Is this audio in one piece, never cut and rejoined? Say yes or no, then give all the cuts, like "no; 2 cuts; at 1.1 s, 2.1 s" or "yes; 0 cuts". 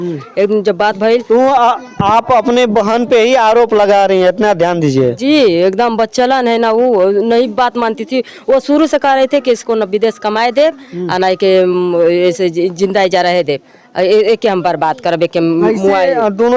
yes; 0 cuts